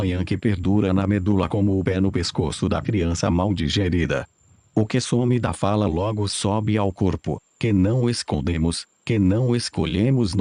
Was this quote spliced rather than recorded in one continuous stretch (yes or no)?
no